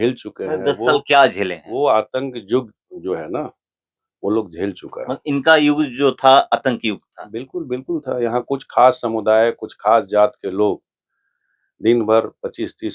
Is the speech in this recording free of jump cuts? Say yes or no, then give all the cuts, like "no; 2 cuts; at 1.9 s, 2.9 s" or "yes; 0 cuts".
yes; 0 cuts